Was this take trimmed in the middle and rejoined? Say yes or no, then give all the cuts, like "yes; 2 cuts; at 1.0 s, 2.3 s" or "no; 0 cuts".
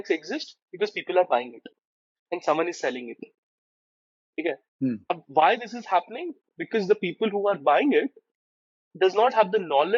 no; 0 cuts